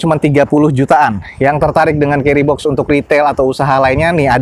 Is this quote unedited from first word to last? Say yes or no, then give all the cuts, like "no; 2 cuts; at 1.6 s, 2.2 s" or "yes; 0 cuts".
yes; 0 cuts